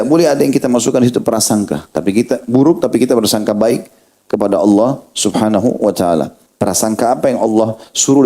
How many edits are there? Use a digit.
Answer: 1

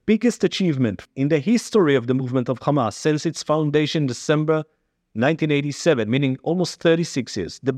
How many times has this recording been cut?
1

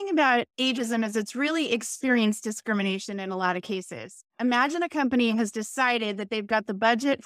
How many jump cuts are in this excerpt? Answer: 1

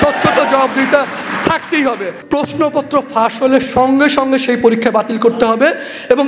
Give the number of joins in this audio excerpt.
1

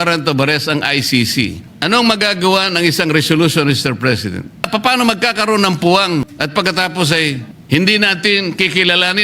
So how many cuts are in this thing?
4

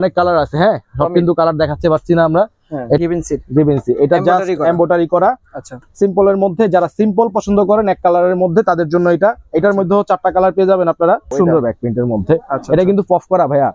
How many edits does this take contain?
2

